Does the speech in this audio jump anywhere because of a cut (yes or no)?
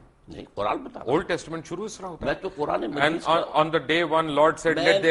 no